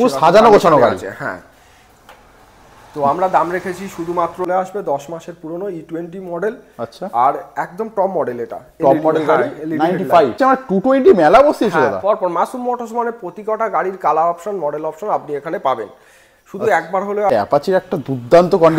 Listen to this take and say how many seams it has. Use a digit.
3